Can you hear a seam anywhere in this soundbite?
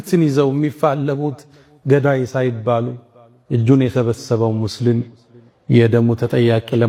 no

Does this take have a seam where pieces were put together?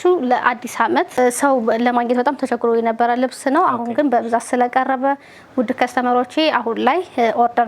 yes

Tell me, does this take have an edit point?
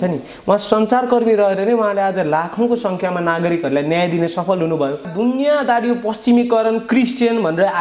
yes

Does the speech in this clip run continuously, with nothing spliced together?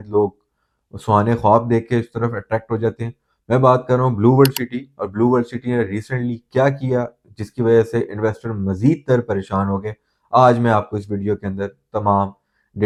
yes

